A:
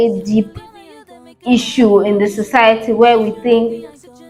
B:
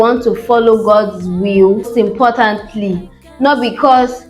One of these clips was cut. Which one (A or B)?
B